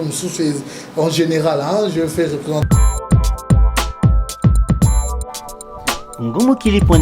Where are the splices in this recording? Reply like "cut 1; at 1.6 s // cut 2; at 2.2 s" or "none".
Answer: cut 1; at 2.6 s